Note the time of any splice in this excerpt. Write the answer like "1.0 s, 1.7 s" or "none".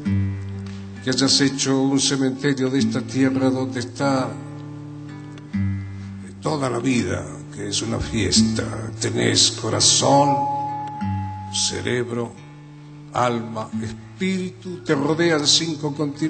0.9 s